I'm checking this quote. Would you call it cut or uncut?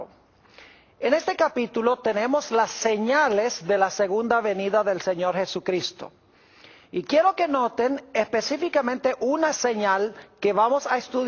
cut